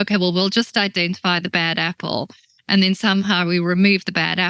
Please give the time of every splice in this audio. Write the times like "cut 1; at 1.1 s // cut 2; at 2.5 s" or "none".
none